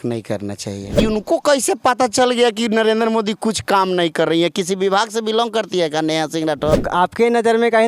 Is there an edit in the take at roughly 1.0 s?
yes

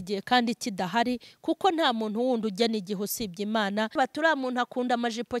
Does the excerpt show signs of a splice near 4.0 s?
yes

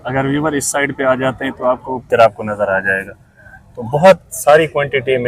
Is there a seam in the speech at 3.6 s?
no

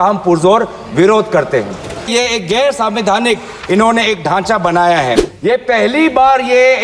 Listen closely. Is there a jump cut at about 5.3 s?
yes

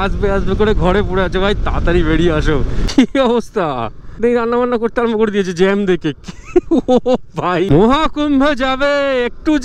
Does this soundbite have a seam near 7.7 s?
yes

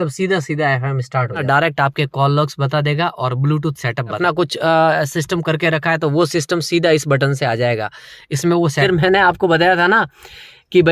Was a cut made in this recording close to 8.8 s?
yes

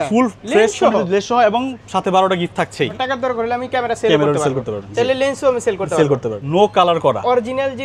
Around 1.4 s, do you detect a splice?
no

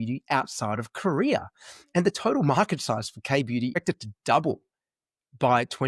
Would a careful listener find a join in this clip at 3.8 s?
yes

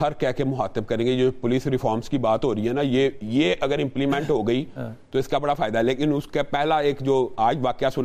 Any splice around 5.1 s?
no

